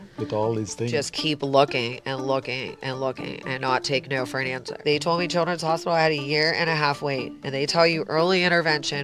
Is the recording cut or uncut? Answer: cut